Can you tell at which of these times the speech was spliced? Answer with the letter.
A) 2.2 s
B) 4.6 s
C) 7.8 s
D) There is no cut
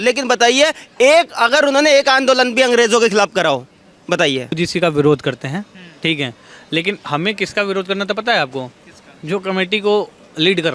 B